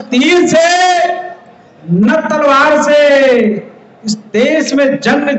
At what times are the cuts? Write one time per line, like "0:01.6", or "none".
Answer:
none